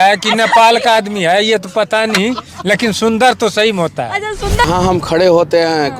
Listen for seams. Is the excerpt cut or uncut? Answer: cut